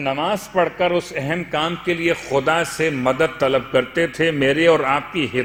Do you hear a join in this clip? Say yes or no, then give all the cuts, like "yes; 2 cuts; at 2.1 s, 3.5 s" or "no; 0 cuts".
no; 0 cuts